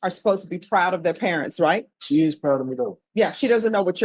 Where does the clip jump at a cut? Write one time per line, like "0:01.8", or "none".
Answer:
0:01.9
0:03.0